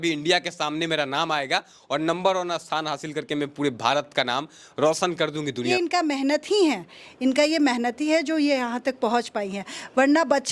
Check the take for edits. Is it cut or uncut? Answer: cut